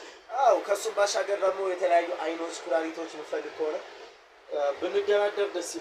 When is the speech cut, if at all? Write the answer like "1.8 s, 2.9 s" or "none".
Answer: none